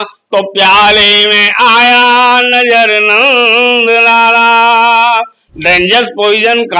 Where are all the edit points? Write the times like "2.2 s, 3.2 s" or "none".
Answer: none